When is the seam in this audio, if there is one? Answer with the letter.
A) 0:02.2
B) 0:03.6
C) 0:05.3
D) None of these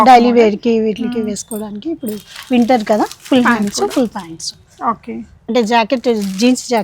C